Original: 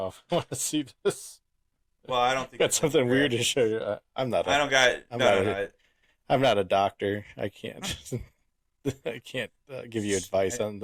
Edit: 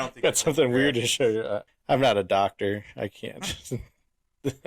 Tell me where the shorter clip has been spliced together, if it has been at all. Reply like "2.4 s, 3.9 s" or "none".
1.7 s